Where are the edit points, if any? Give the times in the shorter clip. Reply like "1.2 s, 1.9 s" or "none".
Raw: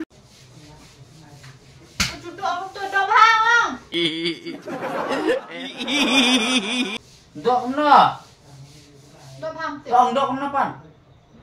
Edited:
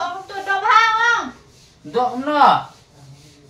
1.4 s